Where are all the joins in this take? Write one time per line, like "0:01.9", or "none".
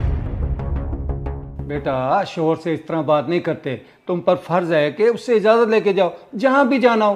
none